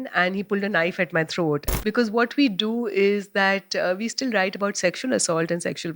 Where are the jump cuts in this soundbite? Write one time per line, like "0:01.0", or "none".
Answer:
0:01.7